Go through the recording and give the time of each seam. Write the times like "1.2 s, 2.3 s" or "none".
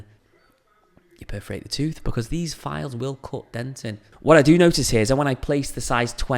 4.1 s